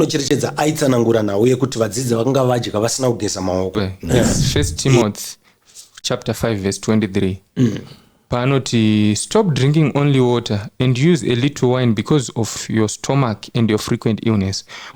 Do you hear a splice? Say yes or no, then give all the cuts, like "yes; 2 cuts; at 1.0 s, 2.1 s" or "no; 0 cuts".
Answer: yes; 1 cut; at 3.7 s